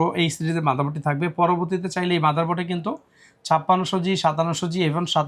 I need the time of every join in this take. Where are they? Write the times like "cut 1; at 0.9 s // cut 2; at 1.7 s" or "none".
none